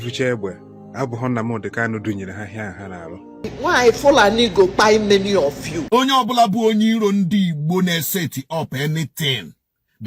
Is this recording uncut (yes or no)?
no